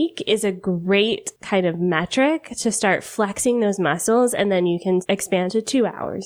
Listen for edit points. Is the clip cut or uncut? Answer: cut